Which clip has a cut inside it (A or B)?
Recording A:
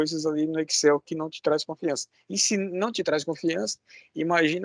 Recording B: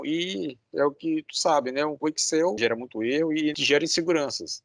B